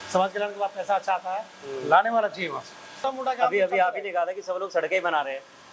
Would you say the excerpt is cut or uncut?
cut